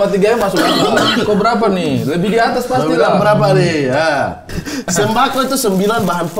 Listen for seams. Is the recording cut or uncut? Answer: cut